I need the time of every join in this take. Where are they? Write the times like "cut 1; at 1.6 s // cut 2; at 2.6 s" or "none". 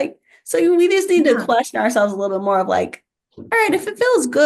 none